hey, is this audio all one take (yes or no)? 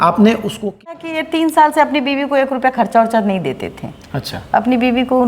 no